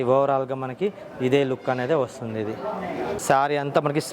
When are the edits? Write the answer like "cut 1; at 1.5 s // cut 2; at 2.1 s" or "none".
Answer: cut 1; at 3.2 s